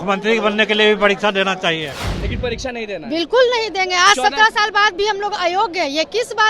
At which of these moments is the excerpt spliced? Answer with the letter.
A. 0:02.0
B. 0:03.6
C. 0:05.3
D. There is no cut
A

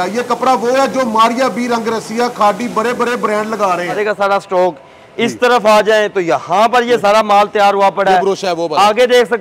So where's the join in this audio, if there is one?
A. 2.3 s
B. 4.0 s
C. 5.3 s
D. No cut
B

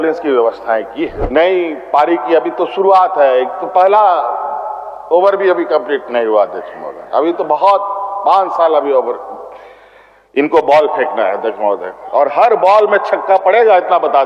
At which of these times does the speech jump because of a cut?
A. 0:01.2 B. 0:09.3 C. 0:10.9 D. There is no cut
A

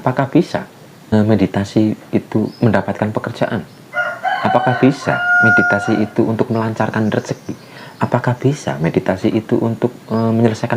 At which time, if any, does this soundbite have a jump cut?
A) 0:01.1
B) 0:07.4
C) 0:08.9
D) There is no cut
A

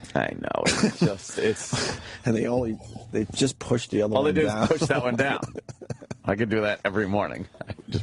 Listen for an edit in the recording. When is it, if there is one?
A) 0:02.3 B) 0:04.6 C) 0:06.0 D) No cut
A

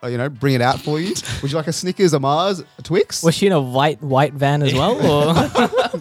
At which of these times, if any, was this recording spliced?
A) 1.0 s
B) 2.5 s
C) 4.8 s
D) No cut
D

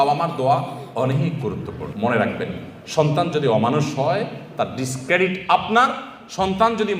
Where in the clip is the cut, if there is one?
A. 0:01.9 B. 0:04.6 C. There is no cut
A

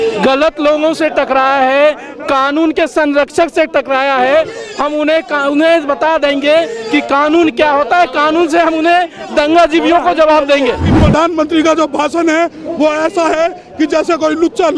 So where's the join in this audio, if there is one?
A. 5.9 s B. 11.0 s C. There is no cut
B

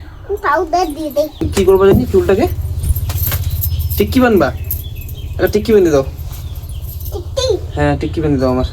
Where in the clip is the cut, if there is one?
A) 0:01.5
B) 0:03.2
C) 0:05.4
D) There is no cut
A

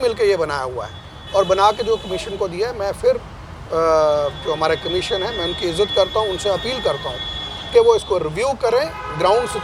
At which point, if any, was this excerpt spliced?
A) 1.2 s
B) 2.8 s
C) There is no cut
C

